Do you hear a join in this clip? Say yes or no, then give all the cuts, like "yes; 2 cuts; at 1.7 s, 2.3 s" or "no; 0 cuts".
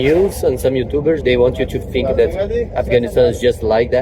yes; 1 cut; at 1.2 s